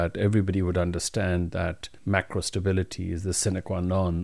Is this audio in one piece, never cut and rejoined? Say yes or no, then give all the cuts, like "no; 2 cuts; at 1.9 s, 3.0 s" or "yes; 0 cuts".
no; 1 cut; at 1.9 s